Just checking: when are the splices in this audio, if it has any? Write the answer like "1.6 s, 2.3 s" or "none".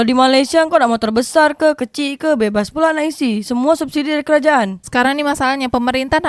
none